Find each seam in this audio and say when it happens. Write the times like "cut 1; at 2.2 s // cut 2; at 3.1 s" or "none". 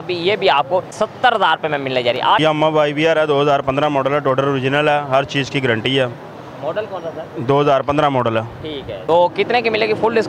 cut 1; at 0.9 s // cut 2; at 2.4 s // cut 3; at 8.9 s